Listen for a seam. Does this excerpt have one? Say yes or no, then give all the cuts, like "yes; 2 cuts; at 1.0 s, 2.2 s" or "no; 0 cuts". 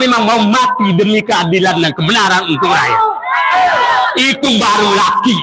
no; 0 cuts